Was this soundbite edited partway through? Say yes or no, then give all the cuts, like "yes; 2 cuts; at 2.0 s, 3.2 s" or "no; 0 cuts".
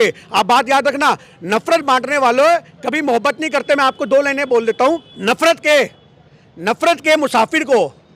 yes; 1 cut; at 5.1 s